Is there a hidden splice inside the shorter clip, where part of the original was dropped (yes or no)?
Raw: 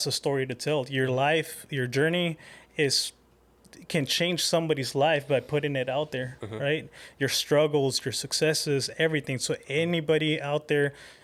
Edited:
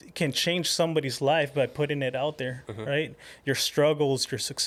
no